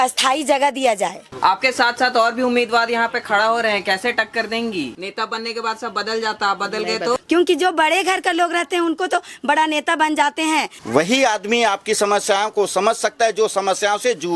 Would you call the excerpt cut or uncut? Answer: cut